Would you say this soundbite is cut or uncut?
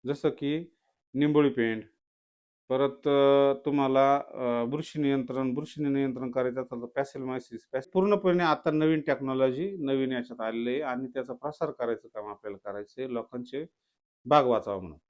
cut